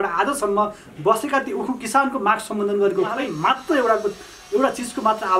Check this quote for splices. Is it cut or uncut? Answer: cut